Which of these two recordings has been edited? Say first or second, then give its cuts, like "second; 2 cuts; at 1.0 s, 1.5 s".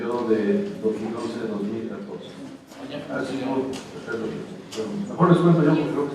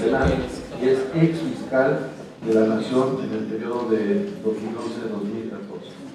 first; 1 cut; at 4.1 s